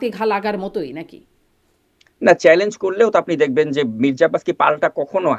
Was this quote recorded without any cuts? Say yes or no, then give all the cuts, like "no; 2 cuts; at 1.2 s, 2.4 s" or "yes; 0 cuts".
yes; 0 cuts